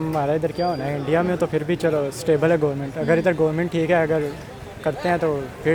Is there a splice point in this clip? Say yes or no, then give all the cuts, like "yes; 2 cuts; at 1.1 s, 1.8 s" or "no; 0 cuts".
no; 0 cuts